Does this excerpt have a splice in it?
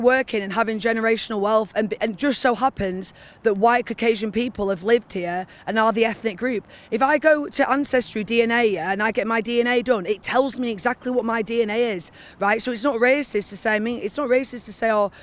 no; 0 cuts

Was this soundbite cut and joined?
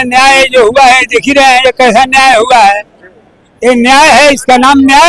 no; 0 cuts

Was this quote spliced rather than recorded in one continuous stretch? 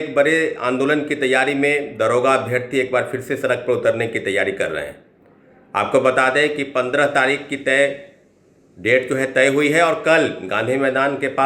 no; 0 cuts

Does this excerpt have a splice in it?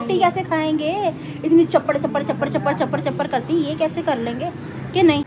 no; 0 cuts

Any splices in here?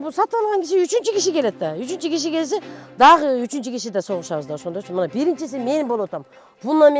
no; 0 cuts

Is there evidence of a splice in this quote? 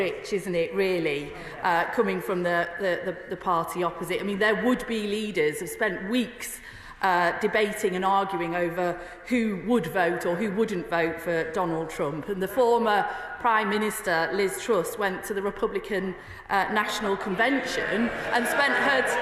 no; 0 cuts

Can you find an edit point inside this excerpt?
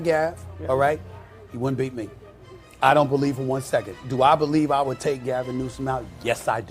no; 0 cuts

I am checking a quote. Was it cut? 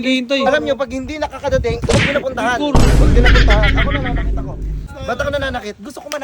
yes; 1 cut; at 4.9 s

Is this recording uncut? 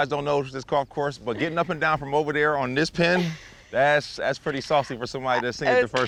yes; 0 cuts

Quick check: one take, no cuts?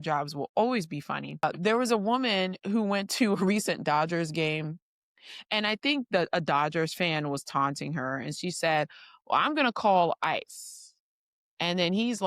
no; 1 cut; at 1.4 s

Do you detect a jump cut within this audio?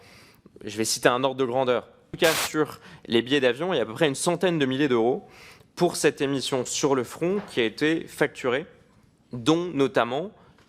yes; 1 cut; at 2.1 s

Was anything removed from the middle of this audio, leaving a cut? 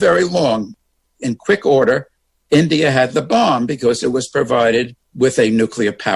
yes; 1 cut; at 5.0 s

